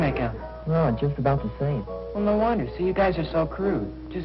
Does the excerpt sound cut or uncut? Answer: cut